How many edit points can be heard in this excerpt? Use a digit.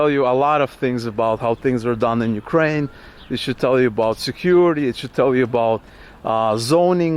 0